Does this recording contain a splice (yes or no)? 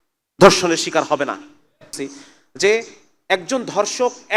yes